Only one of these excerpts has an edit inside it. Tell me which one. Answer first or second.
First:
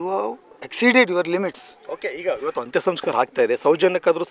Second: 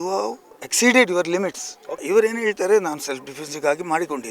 second